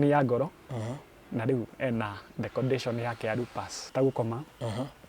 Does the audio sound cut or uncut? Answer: cut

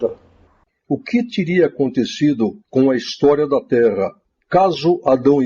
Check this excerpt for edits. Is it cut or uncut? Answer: cut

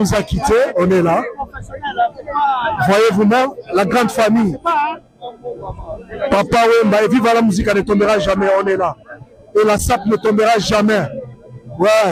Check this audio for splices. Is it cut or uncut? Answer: uncut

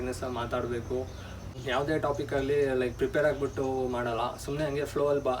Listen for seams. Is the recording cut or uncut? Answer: cut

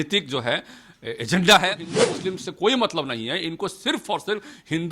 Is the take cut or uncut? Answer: cut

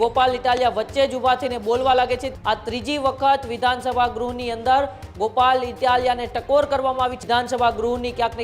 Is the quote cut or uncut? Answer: cut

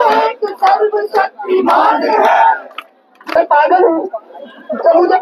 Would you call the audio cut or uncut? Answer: cut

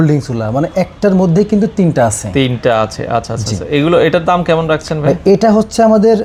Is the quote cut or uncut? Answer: uncut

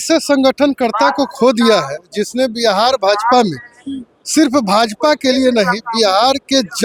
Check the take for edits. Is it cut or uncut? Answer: uncut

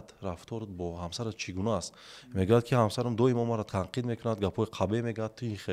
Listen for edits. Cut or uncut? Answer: cut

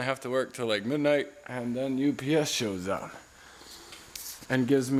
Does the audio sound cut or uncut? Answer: uncut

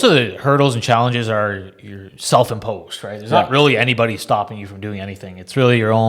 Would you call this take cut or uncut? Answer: uncut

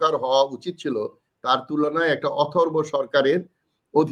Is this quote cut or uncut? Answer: uncut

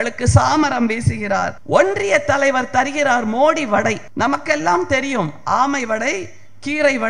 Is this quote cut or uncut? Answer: cut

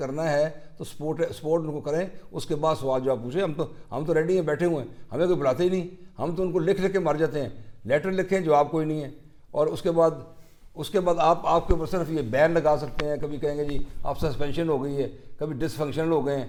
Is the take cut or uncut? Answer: uncut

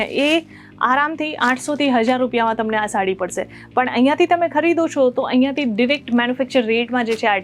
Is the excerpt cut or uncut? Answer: uncut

